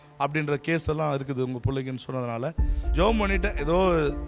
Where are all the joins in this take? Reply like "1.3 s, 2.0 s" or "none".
2.8 s